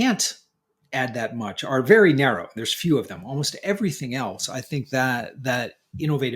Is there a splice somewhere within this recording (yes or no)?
no